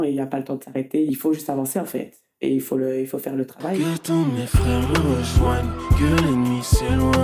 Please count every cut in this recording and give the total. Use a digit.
2